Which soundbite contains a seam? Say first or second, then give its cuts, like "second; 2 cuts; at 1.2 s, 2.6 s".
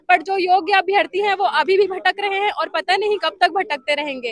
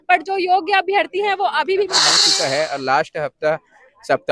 second; 1 cut; at 2.2 s